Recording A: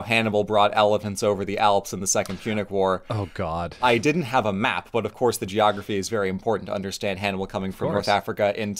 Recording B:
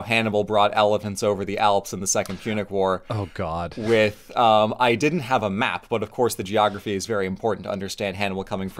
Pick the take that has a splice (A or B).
A